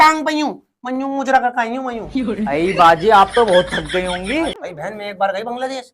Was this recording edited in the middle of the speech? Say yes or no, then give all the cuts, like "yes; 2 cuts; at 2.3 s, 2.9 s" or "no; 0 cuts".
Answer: yes; 1 cut; at 4.6 s